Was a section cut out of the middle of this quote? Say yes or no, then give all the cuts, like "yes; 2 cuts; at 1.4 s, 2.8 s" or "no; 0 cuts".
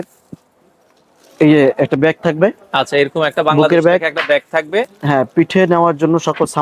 no; 0 cuts